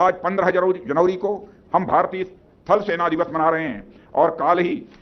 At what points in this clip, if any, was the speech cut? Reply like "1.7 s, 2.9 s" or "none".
none